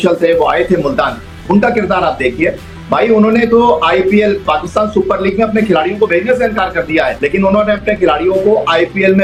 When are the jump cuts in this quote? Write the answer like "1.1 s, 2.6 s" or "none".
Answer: none